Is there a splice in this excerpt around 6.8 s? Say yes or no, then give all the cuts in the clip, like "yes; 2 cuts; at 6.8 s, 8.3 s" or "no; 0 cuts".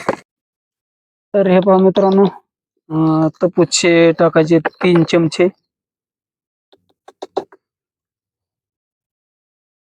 no; 0 cuts